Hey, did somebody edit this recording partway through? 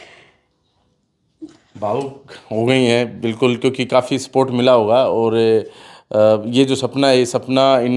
no; 0 cuts

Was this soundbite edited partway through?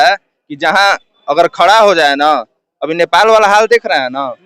no; 0 cuts

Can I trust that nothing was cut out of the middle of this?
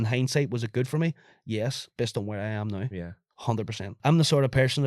no; 1 cut; at 3.9 s

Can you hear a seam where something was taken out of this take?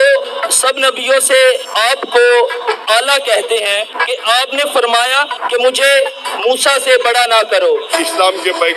yes; 4 cuts; at 1.7 s, 4.0 s, 5.4 s, 7.9 s

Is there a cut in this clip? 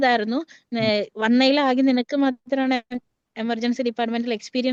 no; 0 cuts

